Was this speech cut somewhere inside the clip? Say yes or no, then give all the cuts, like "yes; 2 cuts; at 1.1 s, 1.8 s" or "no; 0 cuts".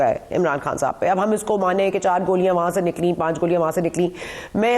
no; 0 cuts